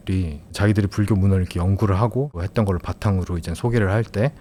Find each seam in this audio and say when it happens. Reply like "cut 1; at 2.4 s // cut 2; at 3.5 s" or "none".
none